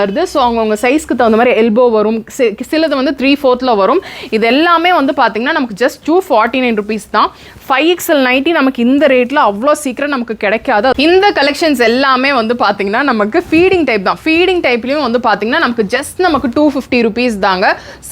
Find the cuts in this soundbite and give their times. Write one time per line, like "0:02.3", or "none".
0:10.9